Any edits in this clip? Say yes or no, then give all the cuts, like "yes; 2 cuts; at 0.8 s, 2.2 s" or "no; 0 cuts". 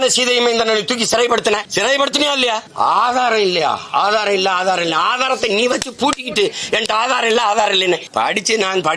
yes; 3 cuts; at 1.7 s, 2.7 s, 8.1 s